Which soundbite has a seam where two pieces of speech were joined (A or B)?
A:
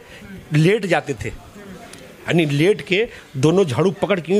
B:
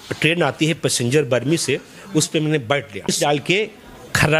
B